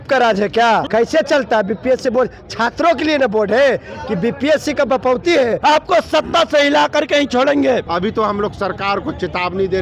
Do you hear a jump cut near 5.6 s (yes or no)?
yes